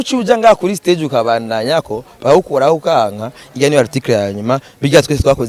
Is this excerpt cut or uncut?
uncut